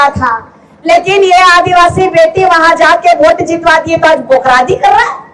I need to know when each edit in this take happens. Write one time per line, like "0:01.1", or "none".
none